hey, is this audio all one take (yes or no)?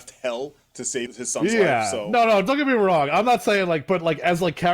no